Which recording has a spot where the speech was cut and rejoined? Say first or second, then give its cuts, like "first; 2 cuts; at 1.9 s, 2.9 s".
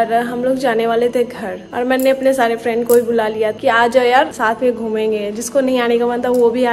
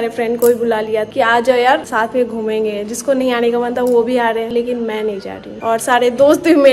second; 1 cut; at 5.5 s